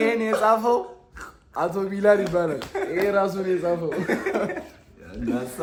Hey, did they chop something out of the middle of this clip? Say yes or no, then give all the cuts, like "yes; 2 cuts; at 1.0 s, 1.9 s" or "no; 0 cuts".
no; 0 cuts